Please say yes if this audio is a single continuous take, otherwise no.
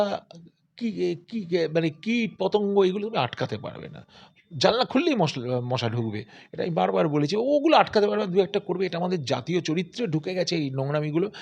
yes